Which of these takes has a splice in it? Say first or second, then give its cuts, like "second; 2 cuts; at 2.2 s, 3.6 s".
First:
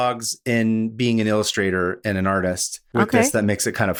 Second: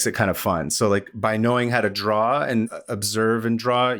second; 1 cut; at 2.7 s